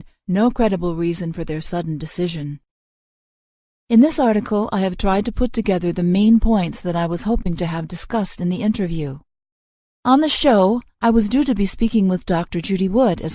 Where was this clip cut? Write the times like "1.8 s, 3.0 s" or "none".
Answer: none